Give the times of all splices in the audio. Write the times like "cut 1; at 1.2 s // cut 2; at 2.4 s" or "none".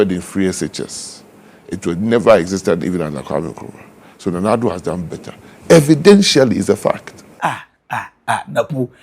cut 1; at 7.4 s